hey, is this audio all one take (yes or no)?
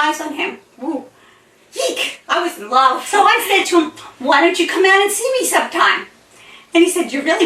no